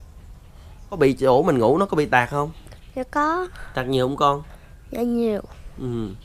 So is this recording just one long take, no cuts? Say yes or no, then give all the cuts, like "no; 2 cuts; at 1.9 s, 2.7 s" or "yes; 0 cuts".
no; 1 cut; at 0.9 s